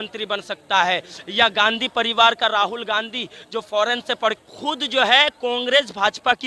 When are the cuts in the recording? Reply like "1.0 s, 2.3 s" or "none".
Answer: 4.4 s